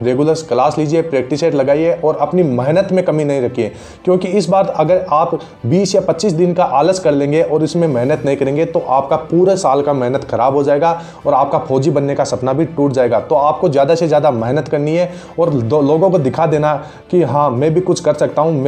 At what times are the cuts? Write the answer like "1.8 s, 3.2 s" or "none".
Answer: none